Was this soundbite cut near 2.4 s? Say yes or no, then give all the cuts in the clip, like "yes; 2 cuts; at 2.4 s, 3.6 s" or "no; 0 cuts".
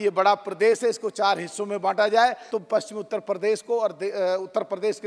yes; 1 cut; at 2.4 s